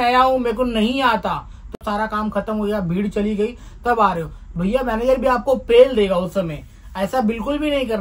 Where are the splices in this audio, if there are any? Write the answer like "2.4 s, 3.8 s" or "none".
1.8 s